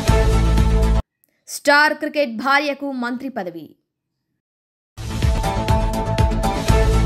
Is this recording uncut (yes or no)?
yes